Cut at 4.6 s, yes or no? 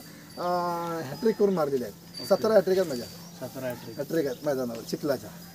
no